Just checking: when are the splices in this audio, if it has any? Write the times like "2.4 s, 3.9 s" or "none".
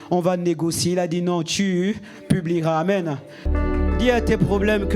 3.5 s